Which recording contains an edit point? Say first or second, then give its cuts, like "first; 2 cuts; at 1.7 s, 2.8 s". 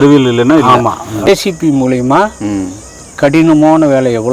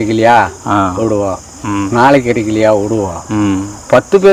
first; 1 cut; at 1.3 s